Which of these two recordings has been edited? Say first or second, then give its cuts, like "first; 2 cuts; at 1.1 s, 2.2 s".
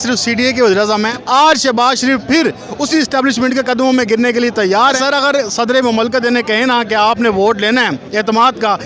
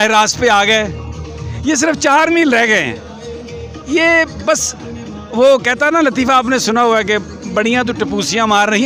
first; 2 cuts; at 1.1 s, 5.0 s